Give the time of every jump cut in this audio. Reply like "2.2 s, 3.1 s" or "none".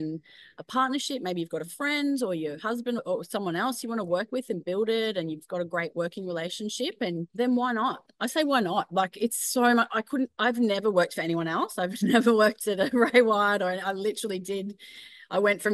3.0 s, 7.3 s